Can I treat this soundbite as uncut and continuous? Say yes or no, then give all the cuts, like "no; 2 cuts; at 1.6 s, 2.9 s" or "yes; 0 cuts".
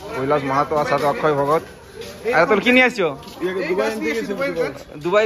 yes; 0 cuts